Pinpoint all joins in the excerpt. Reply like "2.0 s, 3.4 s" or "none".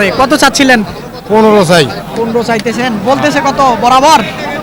none